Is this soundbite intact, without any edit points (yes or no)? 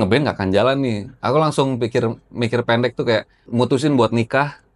no